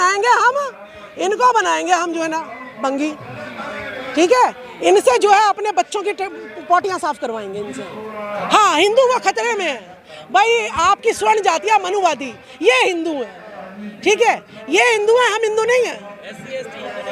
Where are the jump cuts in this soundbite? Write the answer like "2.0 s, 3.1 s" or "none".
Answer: 8.4 s